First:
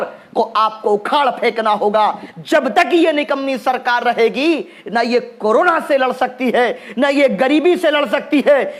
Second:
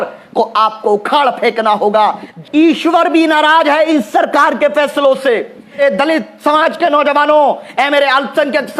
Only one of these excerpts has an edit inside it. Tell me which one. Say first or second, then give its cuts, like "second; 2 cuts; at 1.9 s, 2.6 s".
second; 2 cuts; at 2.4 s, 5.8 s